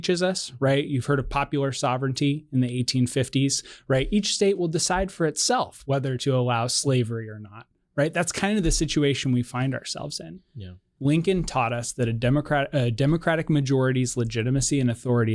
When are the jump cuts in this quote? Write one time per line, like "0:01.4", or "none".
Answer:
0:10.8